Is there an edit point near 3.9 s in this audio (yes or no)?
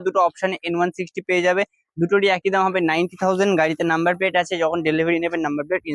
no